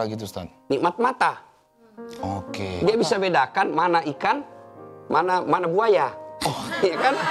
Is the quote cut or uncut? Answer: uncut